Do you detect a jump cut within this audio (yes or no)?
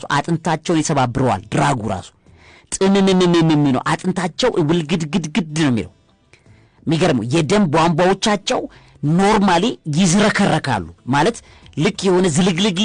no